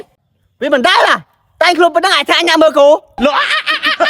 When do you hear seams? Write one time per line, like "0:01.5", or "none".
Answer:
0:03.1